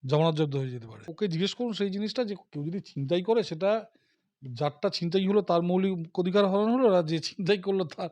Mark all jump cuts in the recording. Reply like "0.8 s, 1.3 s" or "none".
1.1 s

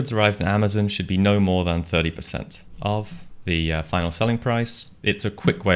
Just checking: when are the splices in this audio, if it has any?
2.6 s, 3.2 s, 4.9 s

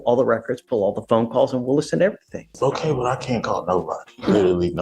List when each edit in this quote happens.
2.5 s

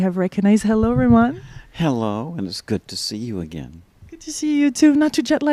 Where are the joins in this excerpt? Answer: none

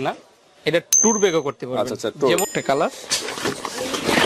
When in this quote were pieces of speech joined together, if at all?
2.5 s

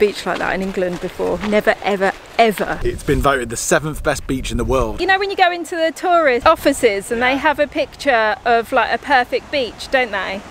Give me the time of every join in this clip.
2.8 s, 4.9 s, 6.4 s

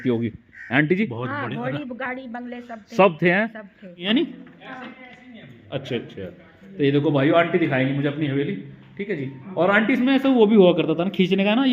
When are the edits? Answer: 4.0 s

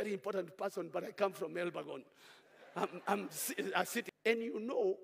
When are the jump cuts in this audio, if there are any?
4.1 s

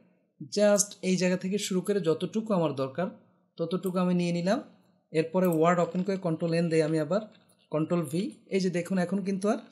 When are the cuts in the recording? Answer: none

